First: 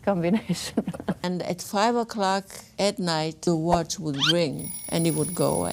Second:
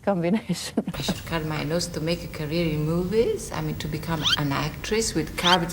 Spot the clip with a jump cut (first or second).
second